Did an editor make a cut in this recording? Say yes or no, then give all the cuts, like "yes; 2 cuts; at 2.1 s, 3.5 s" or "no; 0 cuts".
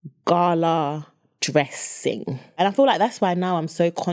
yes; 1 cut; at 2.6 s